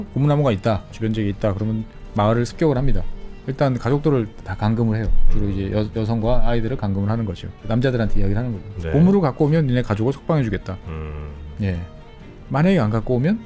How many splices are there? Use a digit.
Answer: 3